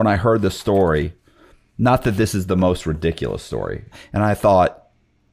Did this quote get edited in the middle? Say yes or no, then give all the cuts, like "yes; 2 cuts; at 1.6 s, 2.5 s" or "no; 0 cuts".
yes; 1 cut; at 3.9 s